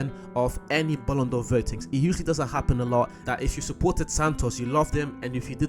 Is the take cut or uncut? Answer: cut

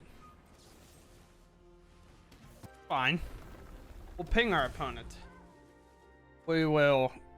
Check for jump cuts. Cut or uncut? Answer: cut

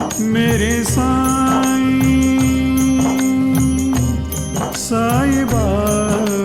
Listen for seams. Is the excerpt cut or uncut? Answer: uncut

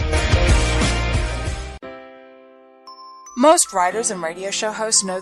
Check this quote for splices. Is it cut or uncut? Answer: cut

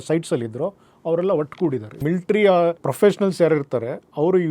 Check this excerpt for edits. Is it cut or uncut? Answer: cut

